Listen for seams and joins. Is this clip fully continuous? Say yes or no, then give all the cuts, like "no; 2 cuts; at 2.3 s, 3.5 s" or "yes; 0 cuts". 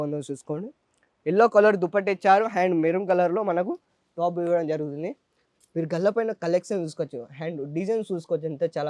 yes; 0 cuts